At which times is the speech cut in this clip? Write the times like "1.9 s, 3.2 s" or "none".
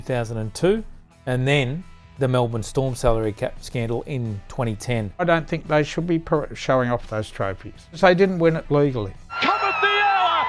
5.2 s, 8.0 s, 9.3 s